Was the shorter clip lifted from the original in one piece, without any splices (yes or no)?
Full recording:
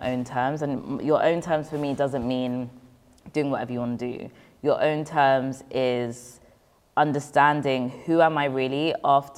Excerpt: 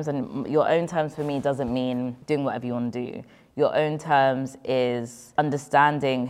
no